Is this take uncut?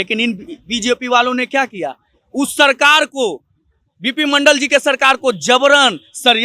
yes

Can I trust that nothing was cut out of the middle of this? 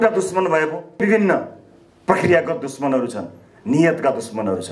no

